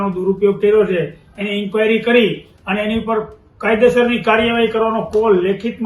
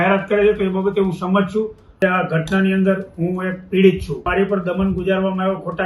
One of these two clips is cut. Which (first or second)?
second